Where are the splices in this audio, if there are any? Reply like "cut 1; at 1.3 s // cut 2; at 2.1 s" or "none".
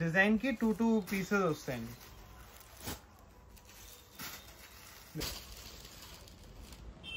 cut 1; at 5.2 s